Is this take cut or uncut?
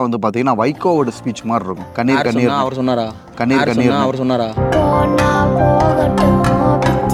uncut